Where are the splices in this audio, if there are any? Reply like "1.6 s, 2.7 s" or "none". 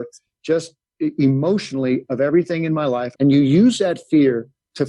3.1 s